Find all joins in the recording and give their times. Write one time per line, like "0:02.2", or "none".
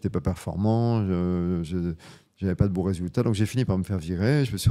none